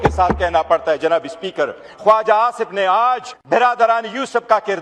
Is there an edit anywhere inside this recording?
yes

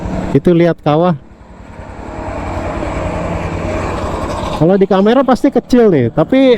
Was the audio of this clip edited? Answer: no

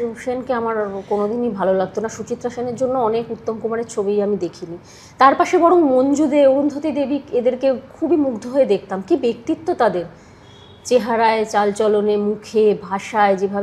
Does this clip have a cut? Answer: no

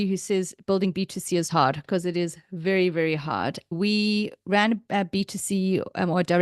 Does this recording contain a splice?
yes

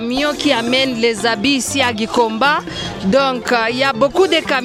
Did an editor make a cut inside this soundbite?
no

